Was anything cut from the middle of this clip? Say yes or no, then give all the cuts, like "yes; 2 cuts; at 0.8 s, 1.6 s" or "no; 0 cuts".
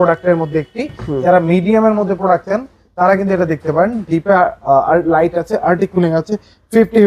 no; 0 cuts